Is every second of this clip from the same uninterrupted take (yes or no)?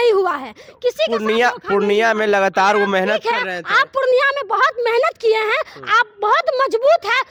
yes